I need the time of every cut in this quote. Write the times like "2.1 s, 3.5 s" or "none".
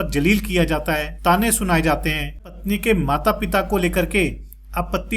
1.1 s, 2.5 s